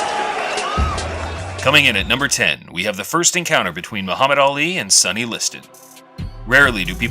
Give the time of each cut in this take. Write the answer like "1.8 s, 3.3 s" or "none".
1.0 s